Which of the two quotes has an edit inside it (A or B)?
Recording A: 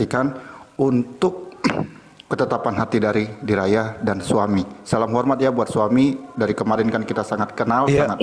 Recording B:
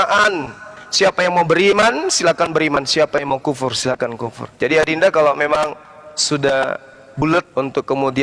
B